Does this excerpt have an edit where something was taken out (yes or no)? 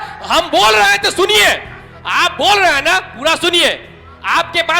no